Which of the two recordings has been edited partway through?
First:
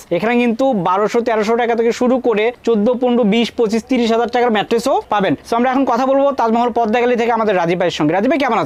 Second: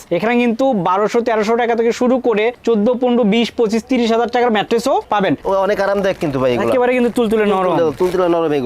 second; 1 cut; at 5.4 s

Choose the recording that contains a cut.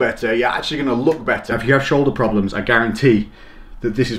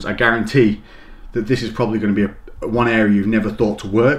first; 1 cut; at 1.5 s

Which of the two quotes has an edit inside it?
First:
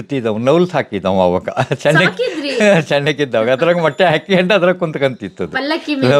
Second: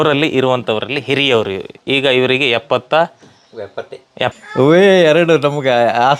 second; 1 cut; at 4.3 s

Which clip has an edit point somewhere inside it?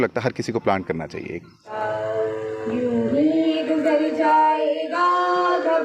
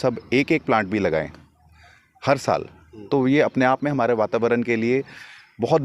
first; 1 cut; at 1.7 s

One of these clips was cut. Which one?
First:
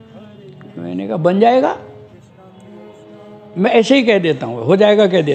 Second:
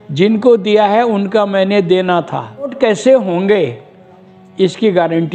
second; 1 cut; at 2.7 s

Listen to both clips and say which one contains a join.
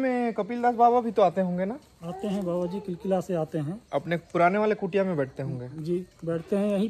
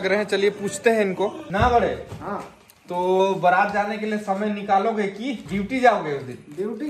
second; 2 cuts; at 1.4 s, 5.4 s

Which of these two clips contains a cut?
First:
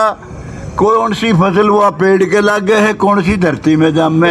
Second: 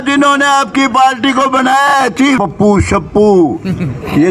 second; 1 cut; at 2.4 s

